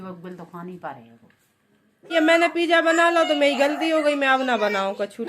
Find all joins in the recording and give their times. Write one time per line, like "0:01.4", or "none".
0:02.1

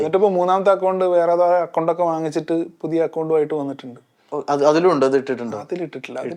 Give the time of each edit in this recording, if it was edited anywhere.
none

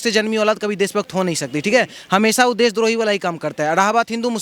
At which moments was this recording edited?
none

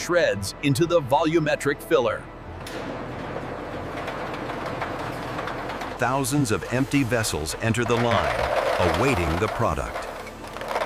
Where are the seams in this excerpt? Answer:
none

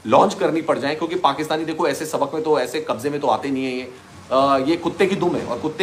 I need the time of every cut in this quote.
none

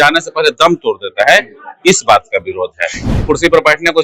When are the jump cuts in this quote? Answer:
0:03.1

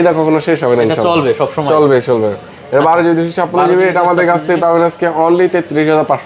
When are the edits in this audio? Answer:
none

